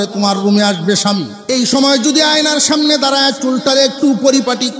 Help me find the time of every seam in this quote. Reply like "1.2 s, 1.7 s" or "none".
1.3 s